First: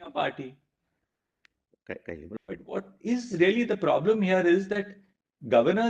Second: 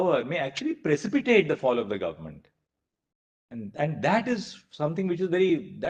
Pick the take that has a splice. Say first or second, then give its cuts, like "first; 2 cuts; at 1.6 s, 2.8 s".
first; 1 cut; at 2.4 s